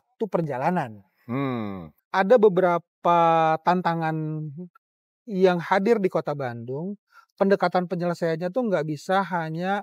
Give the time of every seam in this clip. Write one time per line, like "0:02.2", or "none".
0:01.9